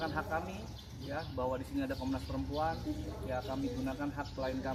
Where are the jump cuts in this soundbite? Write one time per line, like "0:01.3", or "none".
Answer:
none